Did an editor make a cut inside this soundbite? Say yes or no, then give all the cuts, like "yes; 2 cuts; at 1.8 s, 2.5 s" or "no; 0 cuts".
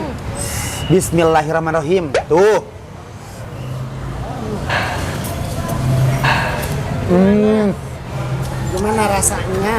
no; 0 cuts